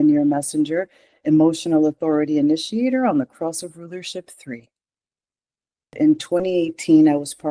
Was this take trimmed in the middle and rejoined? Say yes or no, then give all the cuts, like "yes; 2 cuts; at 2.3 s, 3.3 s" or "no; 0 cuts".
yes; 1 cut; at 5.9 s